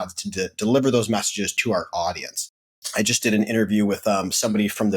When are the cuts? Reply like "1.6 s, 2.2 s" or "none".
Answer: 1.5 s, 2.8 s